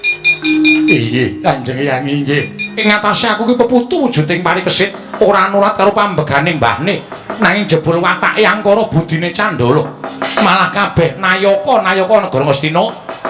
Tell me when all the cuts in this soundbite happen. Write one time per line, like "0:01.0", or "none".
0:02.8